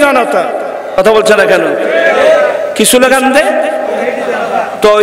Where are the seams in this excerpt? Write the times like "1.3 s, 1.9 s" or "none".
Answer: 1.0 s